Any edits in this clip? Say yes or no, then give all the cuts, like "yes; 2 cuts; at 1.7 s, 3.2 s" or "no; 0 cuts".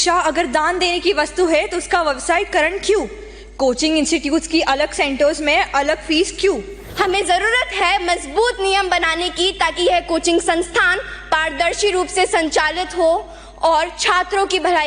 yes; 1 cut; at 6.8 s